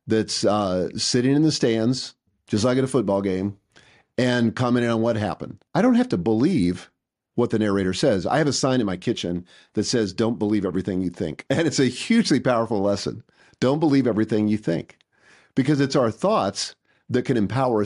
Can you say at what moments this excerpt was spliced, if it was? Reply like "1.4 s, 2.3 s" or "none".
5.6 s, 11.4 s